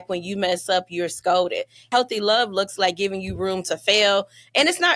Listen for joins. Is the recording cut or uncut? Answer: cut